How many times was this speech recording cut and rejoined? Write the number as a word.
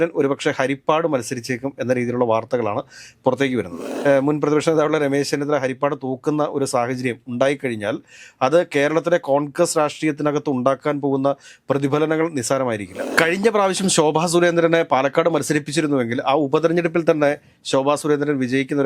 two